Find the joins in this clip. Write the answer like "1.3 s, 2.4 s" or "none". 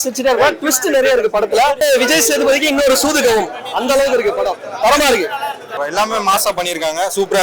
1.8 s, 5.7 s